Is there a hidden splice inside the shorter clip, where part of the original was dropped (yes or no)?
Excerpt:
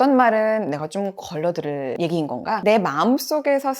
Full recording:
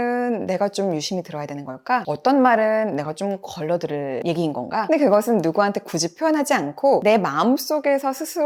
yes